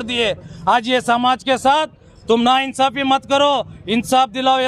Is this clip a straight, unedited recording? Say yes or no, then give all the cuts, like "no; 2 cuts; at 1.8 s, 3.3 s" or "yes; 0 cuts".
yes; 0 cuts